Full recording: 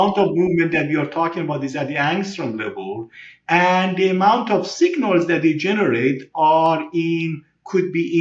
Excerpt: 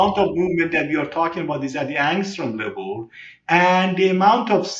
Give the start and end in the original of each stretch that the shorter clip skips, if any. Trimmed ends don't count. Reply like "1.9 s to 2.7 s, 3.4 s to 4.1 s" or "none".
none